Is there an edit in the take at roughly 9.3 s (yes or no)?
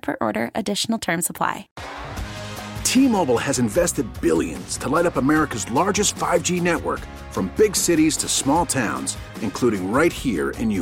no